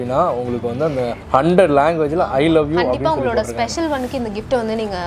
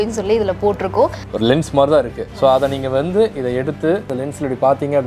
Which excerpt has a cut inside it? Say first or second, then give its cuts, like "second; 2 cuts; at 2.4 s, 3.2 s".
second; 2 cuts; at 1.2 s, 4.1 s